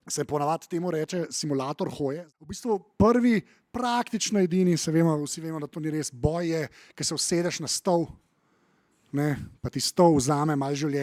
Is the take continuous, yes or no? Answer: no